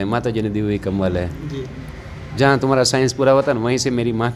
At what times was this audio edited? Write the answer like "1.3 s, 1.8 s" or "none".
none